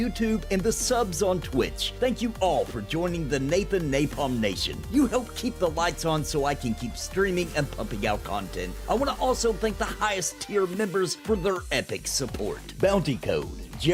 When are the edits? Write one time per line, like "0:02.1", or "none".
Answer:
none